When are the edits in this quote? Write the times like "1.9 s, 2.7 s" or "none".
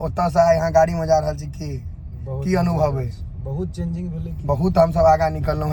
none